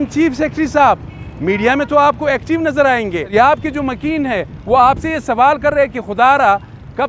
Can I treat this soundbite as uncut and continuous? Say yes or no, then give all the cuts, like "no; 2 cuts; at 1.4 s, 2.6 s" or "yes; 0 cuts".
no; 1 cut; at 3.3 s